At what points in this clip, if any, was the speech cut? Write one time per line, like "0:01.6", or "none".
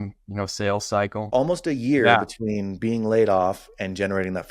0:01.3